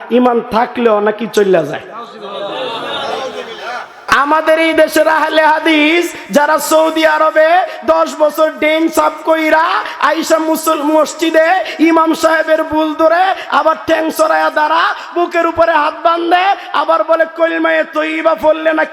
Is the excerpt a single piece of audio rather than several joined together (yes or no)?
no